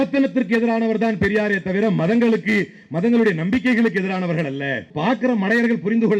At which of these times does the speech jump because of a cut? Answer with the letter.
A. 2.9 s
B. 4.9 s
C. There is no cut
B